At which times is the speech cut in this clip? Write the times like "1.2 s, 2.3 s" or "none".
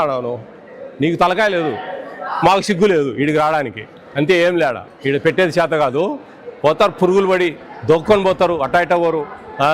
4.9 s

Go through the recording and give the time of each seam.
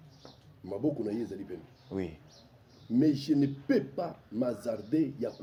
none

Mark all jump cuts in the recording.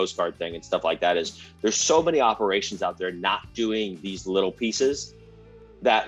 none

